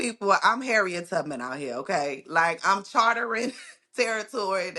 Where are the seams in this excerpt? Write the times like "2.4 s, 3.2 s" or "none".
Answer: none